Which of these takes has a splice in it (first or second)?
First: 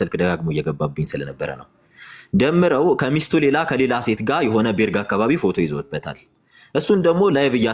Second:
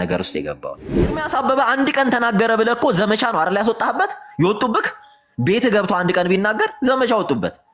second